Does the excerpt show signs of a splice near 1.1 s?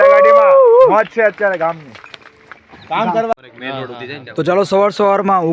no; 1 cut; at 3.3 s

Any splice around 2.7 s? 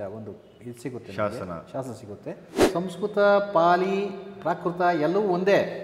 yes; 1 cut; at 2.7 s

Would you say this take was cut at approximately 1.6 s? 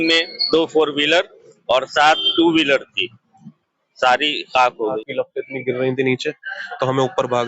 no; 1 cut; at 5.0 s

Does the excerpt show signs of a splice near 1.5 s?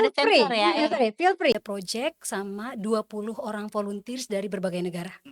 yes; 1 cut; at 1.5 s

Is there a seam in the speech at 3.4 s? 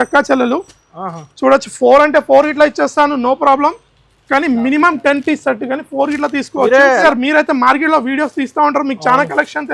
no; 1 cut; at 7.0 s

